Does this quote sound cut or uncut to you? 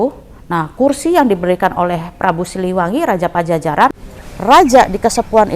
cut